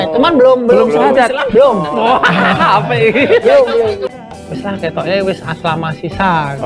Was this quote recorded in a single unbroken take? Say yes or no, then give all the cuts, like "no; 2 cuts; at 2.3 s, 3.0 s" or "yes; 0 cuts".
no; 1 cut; at 4.0 s